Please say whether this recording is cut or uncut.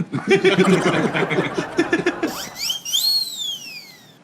cut